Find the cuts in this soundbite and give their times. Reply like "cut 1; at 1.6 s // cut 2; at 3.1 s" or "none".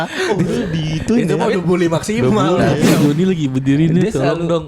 cut 1; at 2.9 s